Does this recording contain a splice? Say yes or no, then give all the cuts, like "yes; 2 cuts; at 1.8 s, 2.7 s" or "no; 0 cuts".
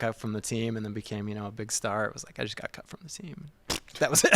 no; 0 cuts